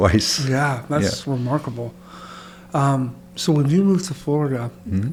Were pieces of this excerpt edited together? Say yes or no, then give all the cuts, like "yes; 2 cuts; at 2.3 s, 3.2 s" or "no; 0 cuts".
no; 0 cuts